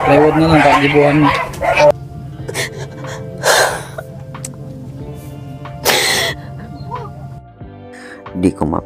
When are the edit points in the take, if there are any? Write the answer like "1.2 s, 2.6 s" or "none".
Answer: 1.9 s